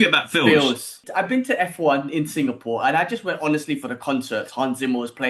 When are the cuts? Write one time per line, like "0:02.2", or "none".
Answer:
0:01.1